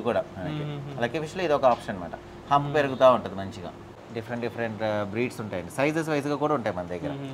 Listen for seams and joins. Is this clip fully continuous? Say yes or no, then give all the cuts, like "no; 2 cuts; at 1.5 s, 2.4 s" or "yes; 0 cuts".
no; 1 cut; at 4.1 s